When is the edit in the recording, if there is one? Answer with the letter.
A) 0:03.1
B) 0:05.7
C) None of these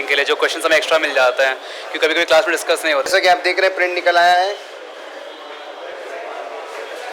A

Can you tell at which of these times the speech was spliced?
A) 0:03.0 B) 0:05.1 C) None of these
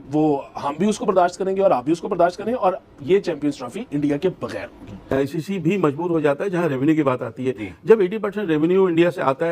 B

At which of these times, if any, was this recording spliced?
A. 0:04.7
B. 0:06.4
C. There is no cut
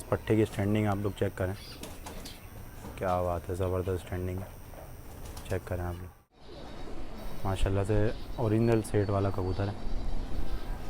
B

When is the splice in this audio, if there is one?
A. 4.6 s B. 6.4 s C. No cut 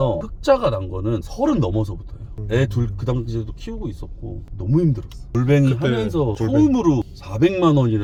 C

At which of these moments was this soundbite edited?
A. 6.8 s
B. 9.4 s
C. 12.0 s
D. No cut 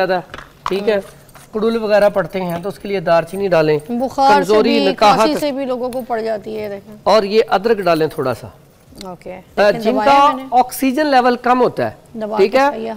B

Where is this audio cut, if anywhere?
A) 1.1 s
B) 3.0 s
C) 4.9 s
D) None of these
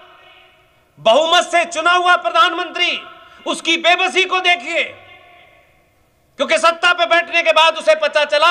D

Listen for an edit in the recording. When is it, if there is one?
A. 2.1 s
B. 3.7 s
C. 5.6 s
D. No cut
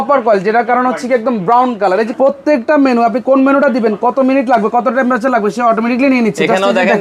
A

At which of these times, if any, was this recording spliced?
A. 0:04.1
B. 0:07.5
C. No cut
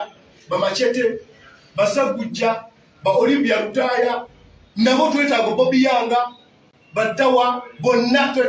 B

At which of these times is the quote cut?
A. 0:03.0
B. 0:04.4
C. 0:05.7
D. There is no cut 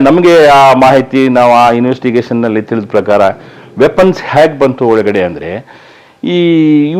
D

